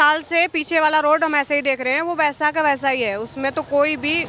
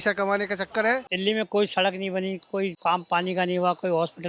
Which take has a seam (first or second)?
second